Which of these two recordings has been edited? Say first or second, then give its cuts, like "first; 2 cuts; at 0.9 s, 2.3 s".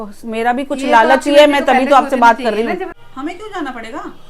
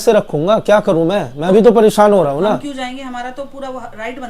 first; 1 cut; at 3.0 s